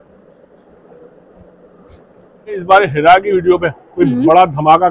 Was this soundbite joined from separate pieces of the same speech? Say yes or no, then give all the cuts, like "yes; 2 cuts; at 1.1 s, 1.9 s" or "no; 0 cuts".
yes; 1 cut; at 2.6 s